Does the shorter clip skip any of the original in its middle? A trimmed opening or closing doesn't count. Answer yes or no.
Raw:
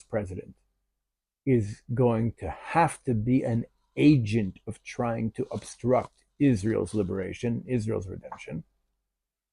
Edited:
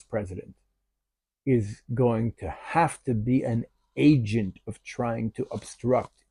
no